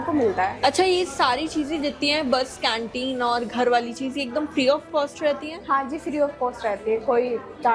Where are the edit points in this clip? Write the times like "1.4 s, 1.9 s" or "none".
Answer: none